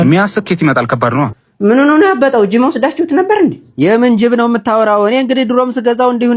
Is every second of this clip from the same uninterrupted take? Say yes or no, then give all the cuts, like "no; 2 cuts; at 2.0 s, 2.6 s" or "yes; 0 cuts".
no; 1 cut; at 1.4 s